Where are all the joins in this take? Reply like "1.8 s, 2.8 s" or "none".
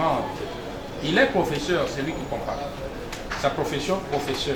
none